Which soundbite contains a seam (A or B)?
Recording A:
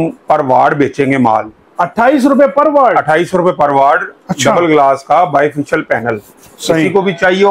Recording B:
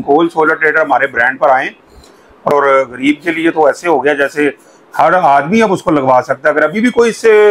B